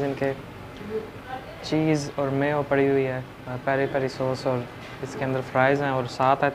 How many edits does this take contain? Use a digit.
0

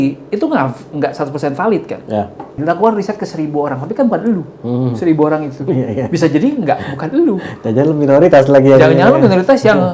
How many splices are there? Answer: 1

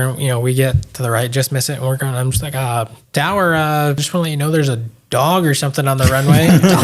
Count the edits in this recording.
2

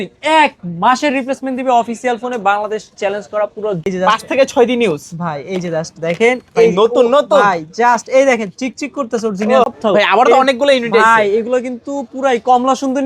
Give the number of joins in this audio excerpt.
2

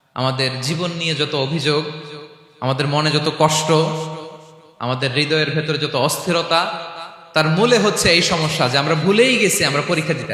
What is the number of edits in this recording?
0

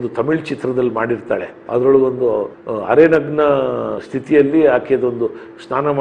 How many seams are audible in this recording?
1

